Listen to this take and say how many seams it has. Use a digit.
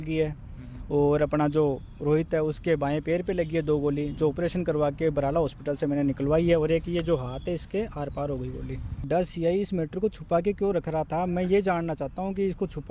1